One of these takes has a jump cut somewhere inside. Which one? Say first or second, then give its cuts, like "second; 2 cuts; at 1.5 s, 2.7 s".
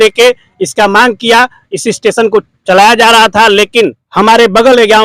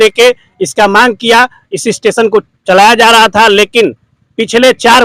first; 1 cut; at 4.0 s